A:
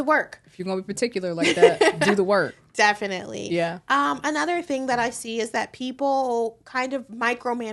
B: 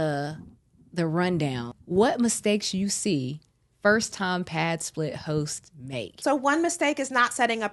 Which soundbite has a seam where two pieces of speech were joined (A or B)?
B